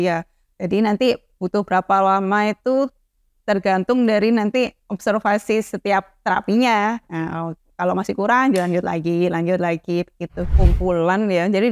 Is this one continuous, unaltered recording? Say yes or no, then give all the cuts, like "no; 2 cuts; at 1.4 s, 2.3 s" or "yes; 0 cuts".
no; 1 cut; at 10.4 s